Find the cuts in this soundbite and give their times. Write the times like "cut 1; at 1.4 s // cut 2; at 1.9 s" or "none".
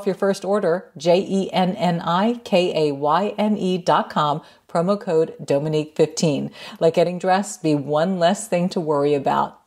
none

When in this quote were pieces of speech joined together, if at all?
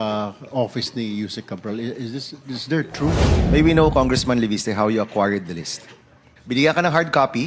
cut 1; at 3.2 s // cut 2; at 6.3 s

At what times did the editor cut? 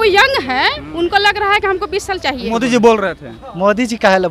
cut 1; at 2.5 s

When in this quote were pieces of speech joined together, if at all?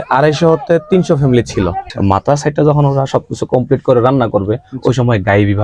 cut 1; at 1.9 s

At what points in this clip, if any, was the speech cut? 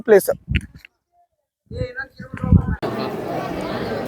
cut 1; at 2.8 s

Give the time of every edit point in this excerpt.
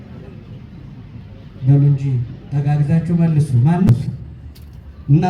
cut 1; at 3.9 s

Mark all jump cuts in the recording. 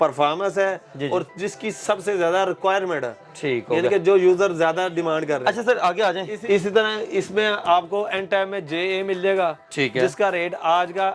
none

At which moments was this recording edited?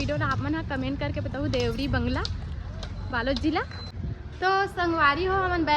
cut 1; at 3.8 s

